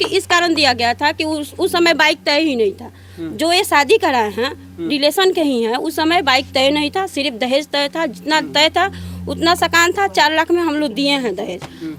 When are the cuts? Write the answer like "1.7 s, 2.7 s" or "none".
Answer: none